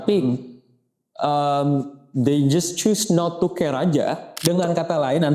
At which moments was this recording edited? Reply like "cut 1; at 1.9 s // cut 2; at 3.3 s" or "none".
cut 1; at 4.4 s